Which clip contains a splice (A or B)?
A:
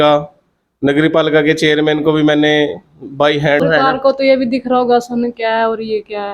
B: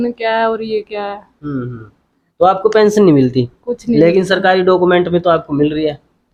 A